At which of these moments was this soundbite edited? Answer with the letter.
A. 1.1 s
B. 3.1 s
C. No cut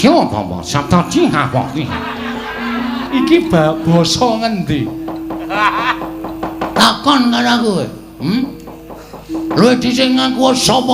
B